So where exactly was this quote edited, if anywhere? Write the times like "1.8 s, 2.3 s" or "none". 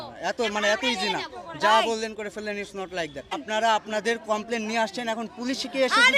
3.4 s